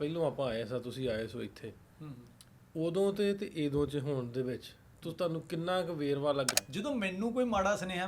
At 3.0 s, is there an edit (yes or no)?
no